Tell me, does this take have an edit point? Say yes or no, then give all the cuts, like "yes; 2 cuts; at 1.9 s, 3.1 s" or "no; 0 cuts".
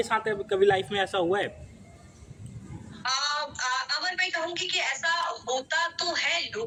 no; 0 cuts